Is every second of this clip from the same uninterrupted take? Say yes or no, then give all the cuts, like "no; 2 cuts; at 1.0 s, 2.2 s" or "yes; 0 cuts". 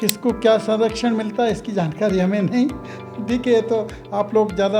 yes; 0 cuts